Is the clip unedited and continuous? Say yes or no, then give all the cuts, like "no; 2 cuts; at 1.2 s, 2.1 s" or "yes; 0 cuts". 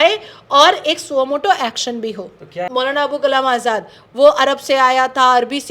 no; 1 cut; at 2.7 s